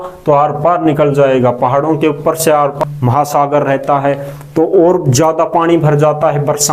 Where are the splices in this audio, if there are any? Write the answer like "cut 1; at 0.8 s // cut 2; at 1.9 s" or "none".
cut 1; at 2.8 s